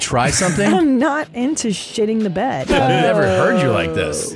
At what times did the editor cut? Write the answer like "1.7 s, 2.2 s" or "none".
2.7 s